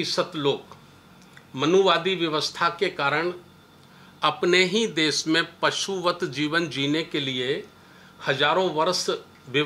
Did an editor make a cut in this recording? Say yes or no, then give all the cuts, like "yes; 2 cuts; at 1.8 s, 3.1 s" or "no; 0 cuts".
no; 0 cuts